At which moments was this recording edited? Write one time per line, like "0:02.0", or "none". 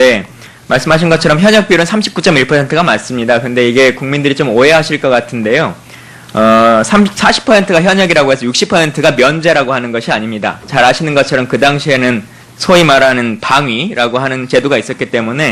none